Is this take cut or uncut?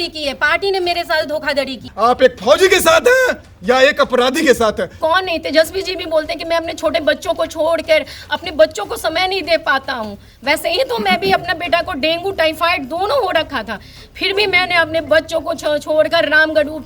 cut